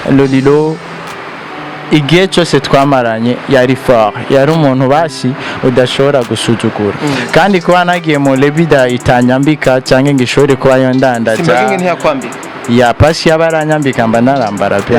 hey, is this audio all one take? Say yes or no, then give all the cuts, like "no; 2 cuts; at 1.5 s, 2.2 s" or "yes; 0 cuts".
no; 1 cut; at 7.0 s